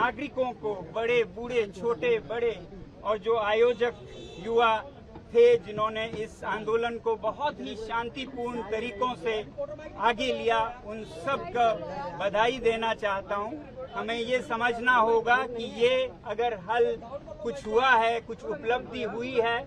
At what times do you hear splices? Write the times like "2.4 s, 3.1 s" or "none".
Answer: none